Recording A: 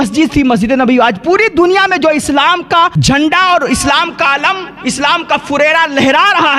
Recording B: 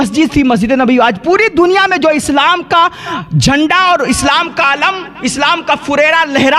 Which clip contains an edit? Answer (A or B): A